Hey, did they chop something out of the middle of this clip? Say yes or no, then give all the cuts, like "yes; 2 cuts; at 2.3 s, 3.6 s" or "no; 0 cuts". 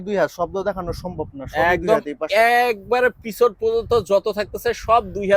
no; 0 cuts